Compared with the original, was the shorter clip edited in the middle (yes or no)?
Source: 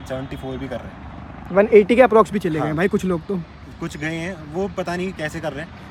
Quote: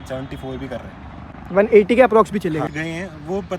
yes